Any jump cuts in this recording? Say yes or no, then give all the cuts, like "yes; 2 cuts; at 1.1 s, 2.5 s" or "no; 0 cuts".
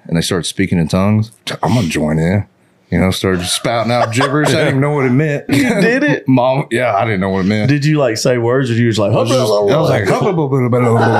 yes; 2 cuts; at 1.4 s, 5.5 s